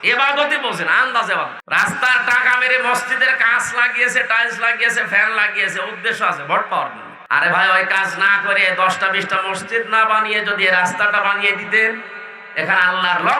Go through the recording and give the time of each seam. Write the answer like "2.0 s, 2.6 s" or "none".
1.6 s, 7.1 s